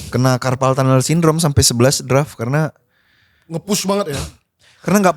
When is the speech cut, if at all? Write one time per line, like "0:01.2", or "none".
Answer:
none